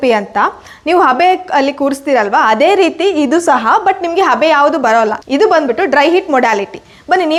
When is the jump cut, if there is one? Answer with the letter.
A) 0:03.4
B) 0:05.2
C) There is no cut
C